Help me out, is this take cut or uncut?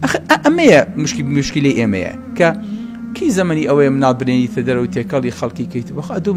uncut